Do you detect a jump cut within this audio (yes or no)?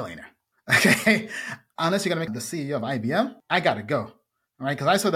yes